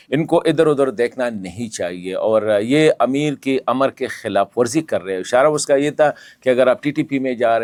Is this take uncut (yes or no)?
yes